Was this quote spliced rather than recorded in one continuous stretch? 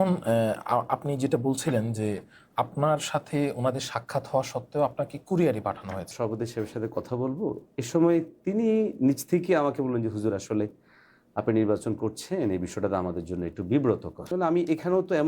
yes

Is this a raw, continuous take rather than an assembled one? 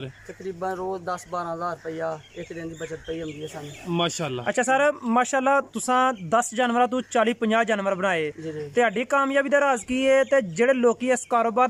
yes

